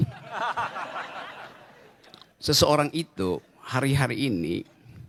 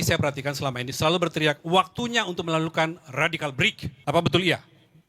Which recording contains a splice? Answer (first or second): second